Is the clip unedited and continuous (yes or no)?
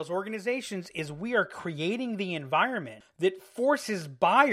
no